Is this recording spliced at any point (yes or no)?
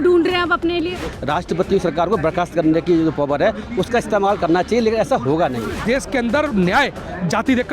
yes